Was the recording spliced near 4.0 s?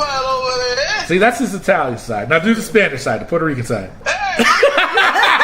yes; 1 cut; at 4.0 s

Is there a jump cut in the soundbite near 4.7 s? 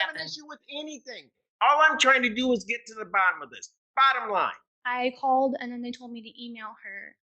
yes; 1 cut; at 4.7 s

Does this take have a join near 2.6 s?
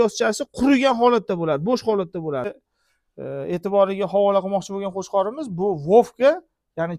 yes; 1 cut; at 2.6 s

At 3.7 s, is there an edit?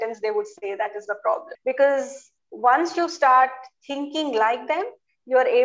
no; 1 cut; at 1.5 s

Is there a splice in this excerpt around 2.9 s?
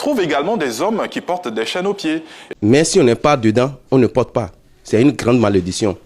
yes; 1 cut; at 2.9 s

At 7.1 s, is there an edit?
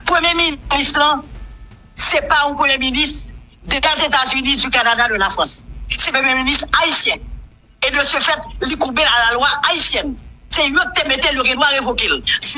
no; 0 cuts

